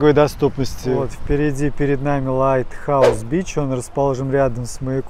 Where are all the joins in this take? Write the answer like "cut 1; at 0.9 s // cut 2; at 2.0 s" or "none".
cut 1; at 1.1 s

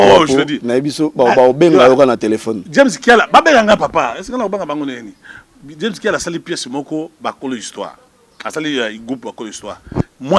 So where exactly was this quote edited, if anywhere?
none

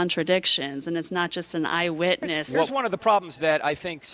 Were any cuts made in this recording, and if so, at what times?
cut 1; at 2.7 s

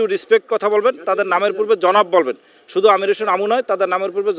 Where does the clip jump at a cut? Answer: none

